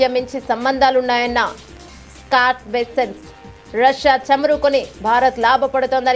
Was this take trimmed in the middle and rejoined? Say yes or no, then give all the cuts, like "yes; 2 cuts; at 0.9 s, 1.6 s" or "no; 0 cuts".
no; 0 cuts